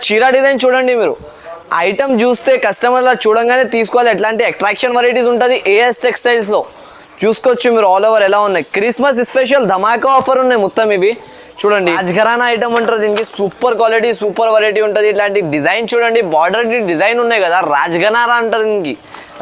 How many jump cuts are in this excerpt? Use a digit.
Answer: 1